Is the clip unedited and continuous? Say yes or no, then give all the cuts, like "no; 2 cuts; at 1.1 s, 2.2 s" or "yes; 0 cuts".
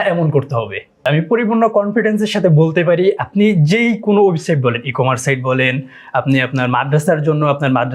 no; 1 cut; at 1.1 s